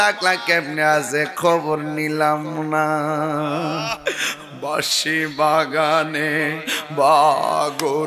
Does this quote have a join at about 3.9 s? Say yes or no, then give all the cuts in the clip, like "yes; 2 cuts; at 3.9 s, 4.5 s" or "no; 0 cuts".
yes; 1 cut; at 3.9 s